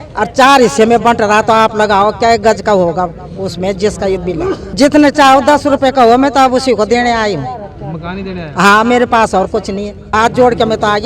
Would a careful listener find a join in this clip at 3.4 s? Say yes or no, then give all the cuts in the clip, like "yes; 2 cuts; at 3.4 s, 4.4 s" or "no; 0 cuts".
no; 2 cuts; at 4.7 s, 10.0 s